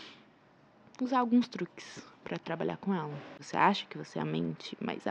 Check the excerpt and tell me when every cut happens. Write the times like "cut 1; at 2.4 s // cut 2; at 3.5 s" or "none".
cut 1; at 3.3 s